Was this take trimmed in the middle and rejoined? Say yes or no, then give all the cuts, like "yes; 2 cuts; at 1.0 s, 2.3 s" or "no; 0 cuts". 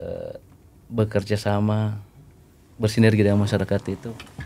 no; 0 cuts